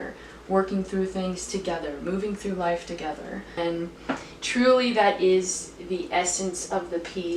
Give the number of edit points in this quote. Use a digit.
1